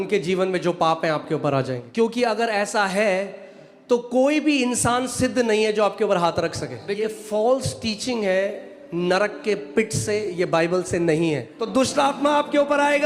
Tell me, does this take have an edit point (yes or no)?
yes